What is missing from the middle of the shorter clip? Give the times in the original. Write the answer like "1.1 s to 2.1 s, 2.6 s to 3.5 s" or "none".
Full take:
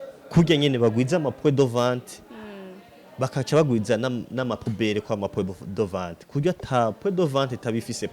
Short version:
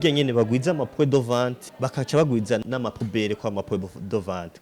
2.1 s to 3.0 s, 4.0 s to 4.3 s